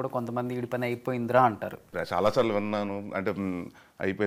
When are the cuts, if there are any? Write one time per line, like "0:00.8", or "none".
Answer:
0:01.9